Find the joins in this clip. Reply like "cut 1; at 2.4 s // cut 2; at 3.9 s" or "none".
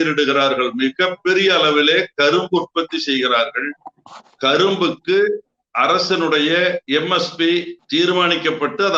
cut 1; at 6.8 s // cut 2; at 7.8 s